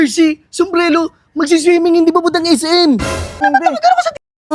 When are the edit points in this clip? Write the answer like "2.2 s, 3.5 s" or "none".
3.4 s